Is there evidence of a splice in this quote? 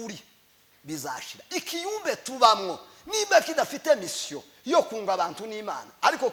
no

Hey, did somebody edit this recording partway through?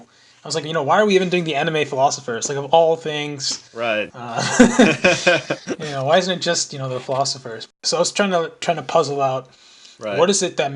yes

